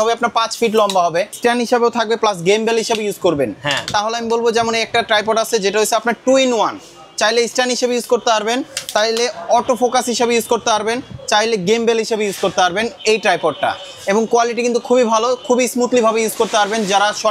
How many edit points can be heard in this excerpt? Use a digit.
1